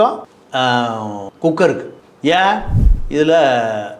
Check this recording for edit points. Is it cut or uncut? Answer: cut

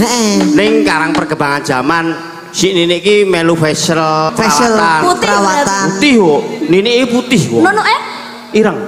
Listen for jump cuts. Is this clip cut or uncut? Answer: cut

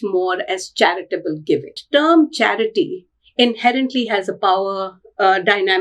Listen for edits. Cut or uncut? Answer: cut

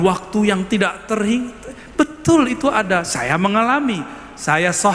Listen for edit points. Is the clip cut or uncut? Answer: uncut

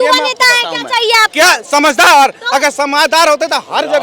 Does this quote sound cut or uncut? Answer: uncut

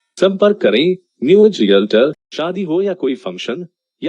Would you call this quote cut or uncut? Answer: cut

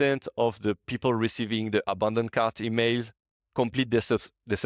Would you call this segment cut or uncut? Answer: uncut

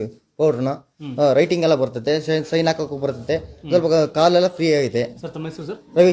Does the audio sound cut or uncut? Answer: uncut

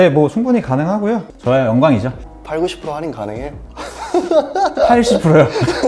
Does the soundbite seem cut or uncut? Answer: cut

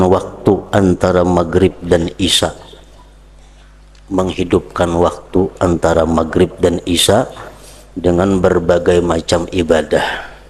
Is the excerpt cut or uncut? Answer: uncut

